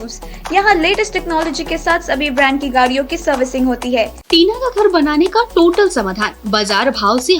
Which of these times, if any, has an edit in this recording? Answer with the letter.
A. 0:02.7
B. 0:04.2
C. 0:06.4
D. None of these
B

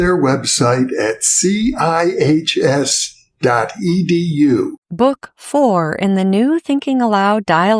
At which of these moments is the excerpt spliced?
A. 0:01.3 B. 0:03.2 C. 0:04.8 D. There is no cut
C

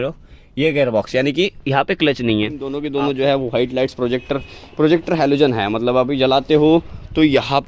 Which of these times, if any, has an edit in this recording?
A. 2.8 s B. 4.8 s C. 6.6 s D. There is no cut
A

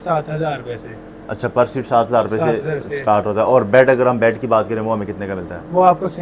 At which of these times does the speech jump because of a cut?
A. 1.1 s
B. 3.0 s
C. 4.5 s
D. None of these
D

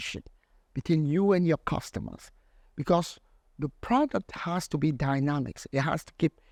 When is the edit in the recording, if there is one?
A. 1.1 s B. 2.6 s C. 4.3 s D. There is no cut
D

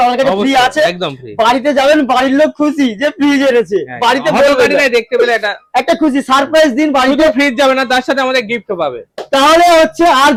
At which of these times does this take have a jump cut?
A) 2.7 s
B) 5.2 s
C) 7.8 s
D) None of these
D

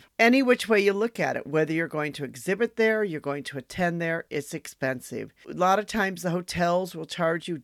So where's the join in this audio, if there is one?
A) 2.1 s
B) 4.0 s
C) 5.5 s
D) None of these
C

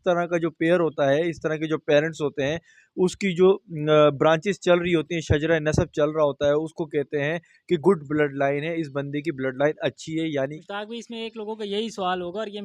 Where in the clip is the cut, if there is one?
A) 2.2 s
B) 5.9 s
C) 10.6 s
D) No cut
C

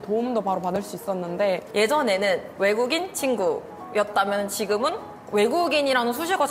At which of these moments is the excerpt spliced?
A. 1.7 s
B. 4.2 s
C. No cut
A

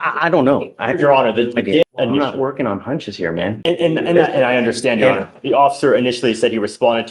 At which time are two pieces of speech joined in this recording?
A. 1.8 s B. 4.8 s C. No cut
A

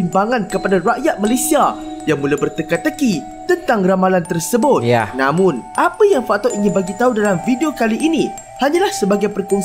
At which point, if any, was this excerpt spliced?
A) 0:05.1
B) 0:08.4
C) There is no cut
C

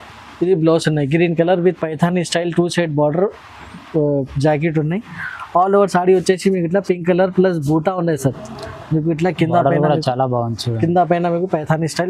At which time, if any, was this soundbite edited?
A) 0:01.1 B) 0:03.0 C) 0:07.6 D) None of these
D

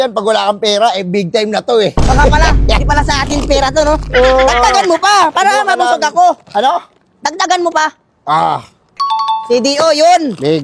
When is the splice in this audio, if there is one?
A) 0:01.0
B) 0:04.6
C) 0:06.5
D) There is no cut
D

